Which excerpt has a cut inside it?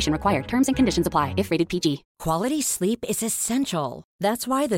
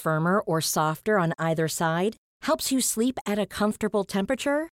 first; 1 cut; at 2.1 s

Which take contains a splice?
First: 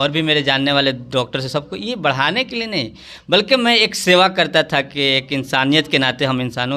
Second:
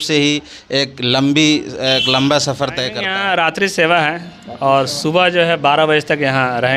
second; 1 cut; at 3.0 s

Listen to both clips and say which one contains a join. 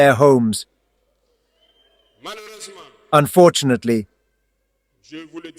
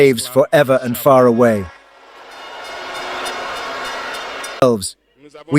second; 1 cut; at 4.6 s

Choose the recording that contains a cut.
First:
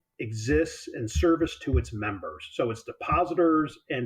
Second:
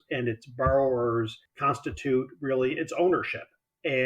second; 1 cut; at 1.5 s

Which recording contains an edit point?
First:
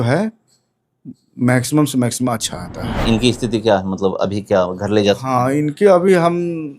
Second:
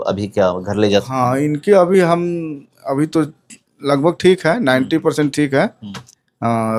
first; 1 cut; at 3.0 s

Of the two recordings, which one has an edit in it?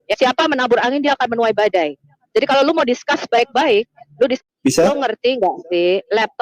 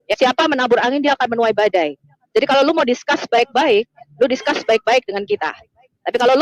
first; 1 cut; at 4.4 s

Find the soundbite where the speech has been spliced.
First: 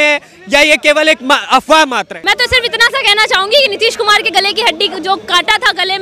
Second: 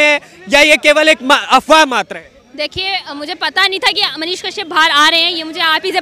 first; 1 cut; at 2.1 s

